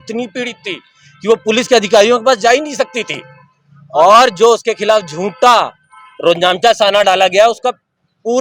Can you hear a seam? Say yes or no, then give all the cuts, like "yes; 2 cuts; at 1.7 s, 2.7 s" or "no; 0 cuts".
no; 0 cuts